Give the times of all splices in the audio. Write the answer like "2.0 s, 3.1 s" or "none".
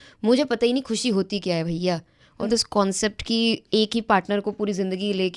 2.5 s

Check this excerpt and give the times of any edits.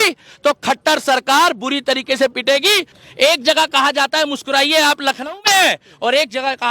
2.9 s

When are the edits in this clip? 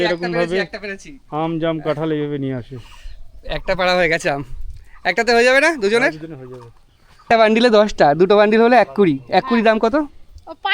7.2 s

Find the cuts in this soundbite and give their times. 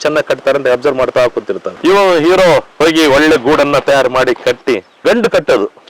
4.9 s

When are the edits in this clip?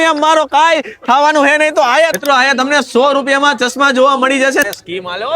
2.1 s, 4.6 s

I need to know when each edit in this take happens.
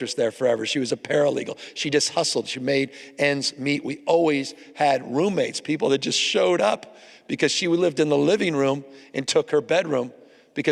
none

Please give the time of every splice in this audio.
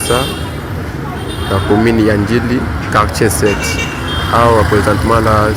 none

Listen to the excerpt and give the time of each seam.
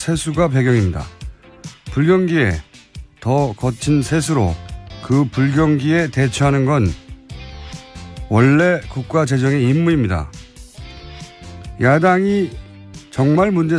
4.9 s

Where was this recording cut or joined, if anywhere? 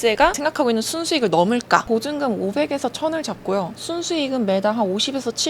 1.8 s

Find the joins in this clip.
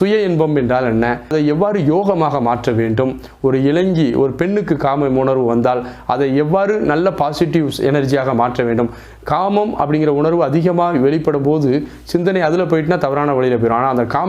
1.3 s

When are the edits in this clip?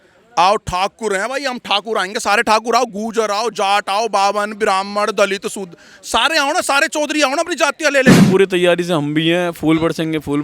8.2 s

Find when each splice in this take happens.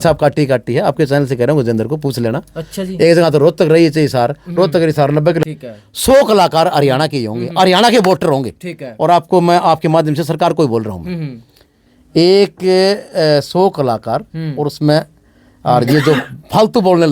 5.4 s

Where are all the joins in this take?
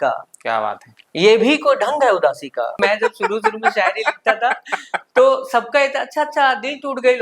2.8 s

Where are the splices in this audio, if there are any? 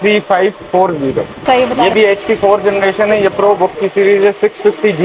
1.3 s

